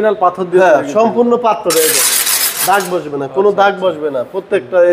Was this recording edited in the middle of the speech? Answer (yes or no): no